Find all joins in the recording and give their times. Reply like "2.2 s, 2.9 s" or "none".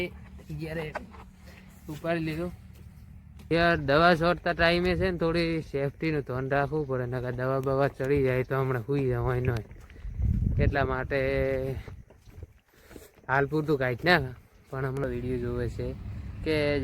3.5 s, 15.0 s